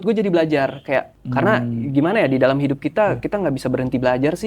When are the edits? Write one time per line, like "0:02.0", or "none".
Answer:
0:01.2